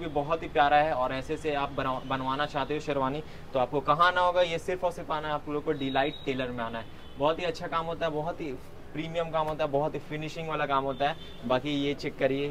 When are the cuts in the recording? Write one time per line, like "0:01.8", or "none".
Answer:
none